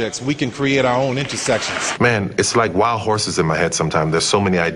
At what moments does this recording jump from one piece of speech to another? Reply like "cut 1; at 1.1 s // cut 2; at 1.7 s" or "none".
cut 1; at 1.8 s